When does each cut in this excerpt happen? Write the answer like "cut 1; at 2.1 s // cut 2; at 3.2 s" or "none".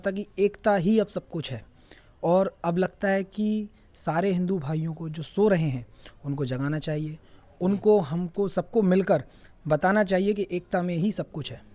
none